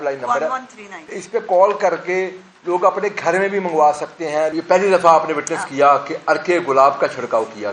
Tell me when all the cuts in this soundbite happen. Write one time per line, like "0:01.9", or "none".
0:01.2
0:04.5